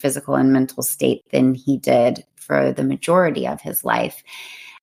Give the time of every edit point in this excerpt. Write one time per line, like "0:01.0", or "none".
none

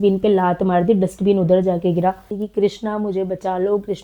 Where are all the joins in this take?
0:02.3

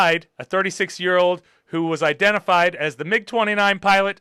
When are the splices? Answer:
none

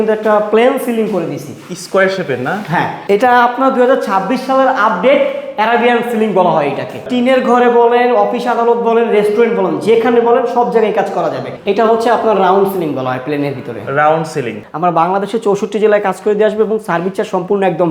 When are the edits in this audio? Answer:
0:03.0
0:07.0
0:11.5
0:14.6

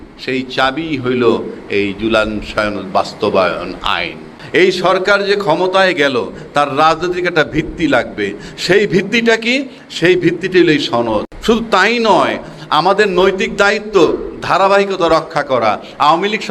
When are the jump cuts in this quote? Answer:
0:04.3
0:11.3

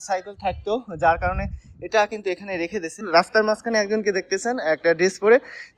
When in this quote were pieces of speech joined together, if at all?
0:03.0

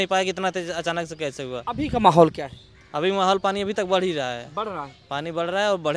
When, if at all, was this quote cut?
none

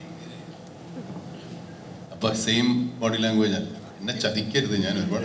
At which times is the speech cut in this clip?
0:03.9

